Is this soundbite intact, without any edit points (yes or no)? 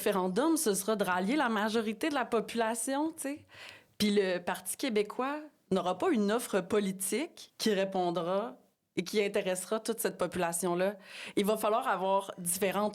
yes